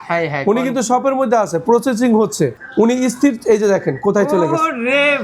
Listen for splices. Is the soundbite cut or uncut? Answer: cut